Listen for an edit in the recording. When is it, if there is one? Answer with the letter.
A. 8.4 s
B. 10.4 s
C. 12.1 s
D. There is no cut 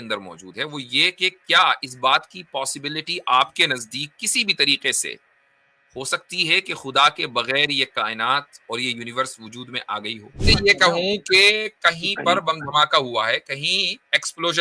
B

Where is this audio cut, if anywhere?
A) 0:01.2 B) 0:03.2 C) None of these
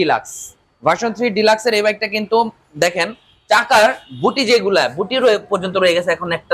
C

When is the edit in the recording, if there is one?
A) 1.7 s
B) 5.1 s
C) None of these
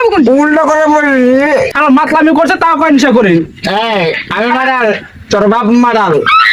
A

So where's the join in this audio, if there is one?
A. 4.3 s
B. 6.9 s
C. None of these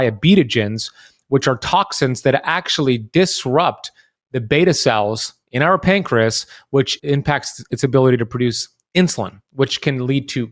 B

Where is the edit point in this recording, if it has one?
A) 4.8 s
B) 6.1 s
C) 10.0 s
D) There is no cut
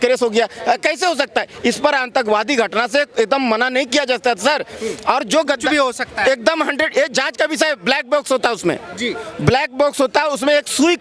D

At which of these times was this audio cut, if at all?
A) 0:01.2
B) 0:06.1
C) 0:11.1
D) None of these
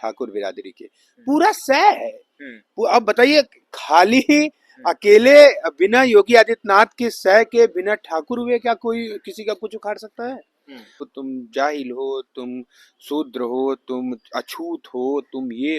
C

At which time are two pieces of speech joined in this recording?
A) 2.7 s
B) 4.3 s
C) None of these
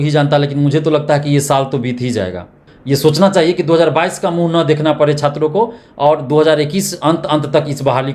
A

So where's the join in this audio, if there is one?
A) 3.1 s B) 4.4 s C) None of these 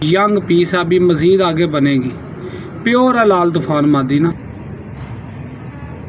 B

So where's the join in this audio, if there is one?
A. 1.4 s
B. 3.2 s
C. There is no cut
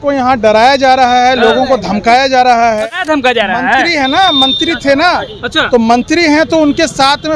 B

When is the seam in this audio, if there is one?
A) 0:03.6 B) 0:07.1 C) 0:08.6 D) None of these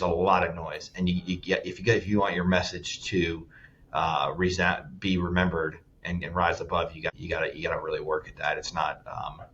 B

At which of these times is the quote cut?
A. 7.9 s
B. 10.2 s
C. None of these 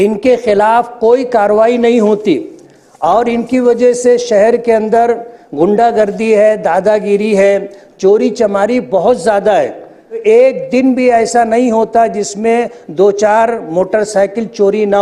B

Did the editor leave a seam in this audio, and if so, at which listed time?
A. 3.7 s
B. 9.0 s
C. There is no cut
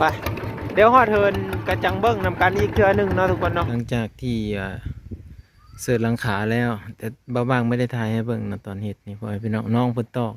A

